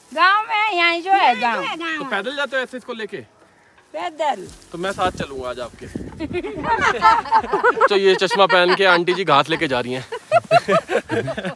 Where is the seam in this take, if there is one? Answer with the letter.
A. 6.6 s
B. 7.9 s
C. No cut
B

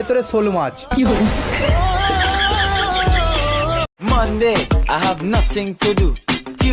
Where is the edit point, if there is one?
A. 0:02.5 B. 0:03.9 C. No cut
B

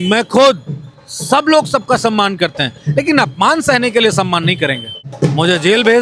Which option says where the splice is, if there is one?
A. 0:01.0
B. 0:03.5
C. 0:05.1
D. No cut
C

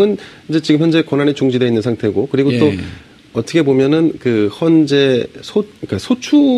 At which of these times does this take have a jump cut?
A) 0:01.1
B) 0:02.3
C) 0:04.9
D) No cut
B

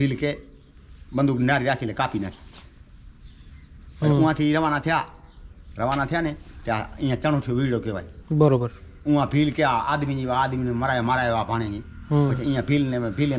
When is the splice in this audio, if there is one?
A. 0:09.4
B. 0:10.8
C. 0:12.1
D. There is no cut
D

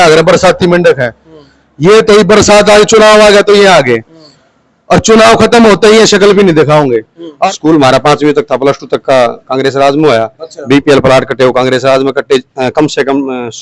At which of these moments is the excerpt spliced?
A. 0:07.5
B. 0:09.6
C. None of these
A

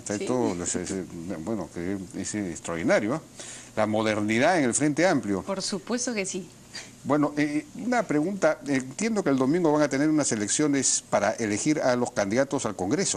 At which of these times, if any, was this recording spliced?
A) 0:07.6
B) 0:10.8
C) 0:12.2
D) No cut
A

